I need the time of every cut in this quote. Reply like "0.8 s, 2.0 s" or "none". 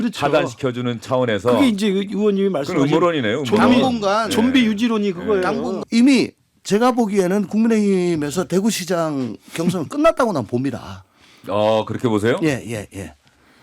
5.8 s